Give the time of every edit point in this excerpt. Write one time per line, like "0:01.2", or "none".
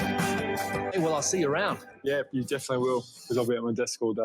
0:00.9